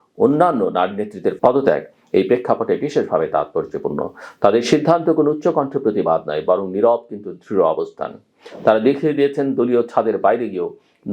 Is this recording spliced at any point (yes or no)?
yes